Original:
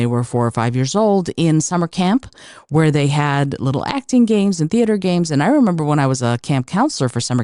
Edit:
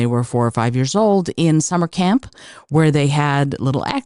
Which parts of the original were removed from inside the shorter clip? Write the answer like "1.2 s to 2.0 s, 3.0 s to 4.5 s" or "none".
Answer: none